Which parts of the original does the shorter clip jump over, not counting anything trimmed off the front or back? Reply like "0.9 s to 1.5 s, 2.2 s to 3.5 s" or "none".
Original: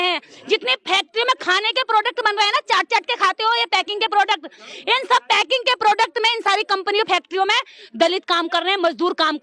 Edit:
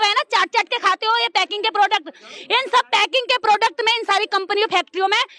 none